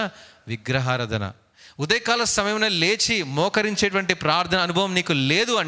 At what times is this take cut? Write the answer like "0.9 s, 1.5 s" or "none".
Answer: 1.5 s